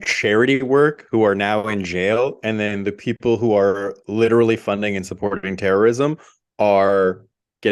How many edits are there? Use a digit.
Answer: 0